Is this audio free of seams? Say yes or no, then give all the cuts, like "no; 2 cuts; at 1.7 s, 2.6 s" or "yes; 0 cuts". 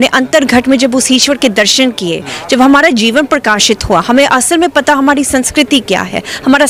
yes; 0 cuts